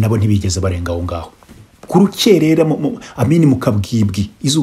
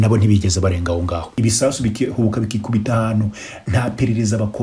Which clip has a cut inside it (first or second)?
second